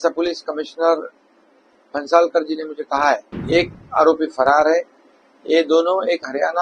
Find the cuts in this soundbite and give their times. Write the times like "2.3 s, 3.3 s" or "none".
3.3 s

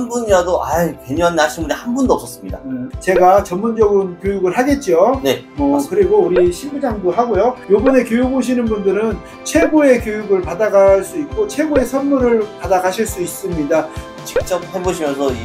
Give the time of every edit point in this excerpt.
2.9 s, 7.6 s, 14.0 s

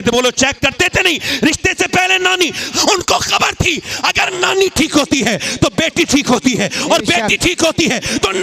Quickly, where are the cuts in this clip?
2.6 s

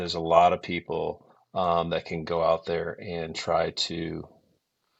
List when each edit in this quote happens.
none

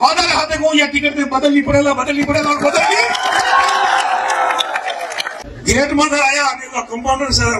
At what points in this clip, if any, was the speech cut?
5.4 s

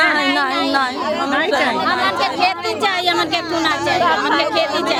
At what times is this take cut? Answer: none

